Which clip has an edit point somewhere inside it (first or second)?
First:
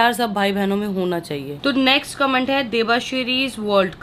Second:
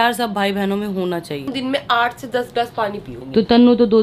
second